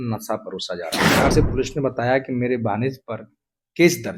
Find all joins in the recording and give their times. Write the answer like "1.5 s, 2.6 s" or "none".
1.3 s